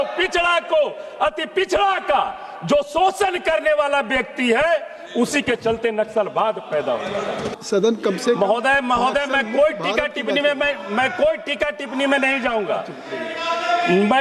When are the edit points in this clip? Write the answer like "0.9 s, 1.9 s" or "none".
7.6 s